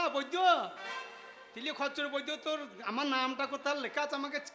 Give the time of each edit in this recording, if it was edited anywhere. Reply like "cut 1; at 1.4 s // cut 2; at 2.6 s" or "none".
none